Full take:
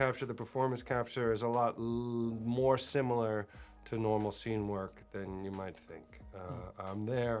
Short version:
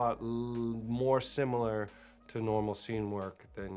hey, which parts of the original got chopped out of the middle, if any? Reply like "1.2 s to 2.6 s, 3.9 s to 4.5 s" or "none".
none